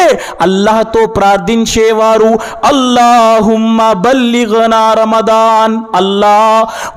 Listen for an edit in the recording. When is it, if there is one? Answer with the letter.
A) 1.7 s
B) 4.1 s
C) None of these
C